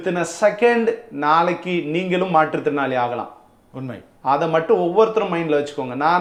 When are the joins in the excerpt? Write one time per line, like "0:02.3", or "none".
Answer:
none